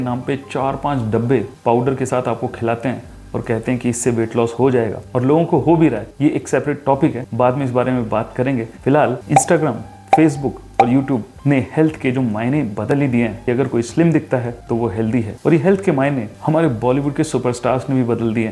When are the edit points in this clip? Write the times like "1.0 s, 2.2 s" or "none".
none